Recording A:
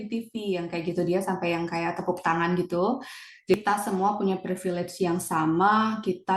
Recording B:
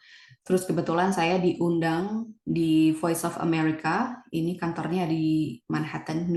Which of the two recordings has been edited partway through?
A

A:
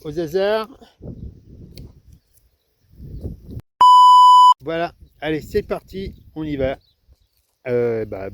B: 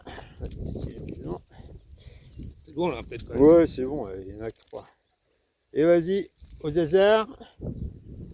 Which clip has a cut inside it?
A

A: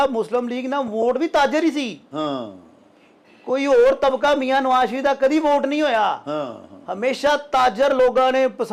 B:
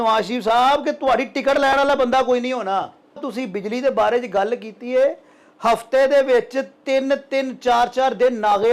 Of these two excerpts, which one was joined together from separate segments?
B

